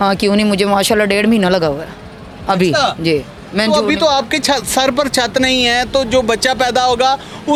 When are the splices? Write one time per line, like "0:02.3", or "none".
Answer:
none